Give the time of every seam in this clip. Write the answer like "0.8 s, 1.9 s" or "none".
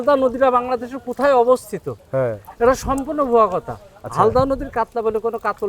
none